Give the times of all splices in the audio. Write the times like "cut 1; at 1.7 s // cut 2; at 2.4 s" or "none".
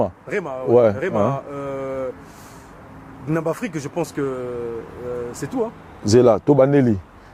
none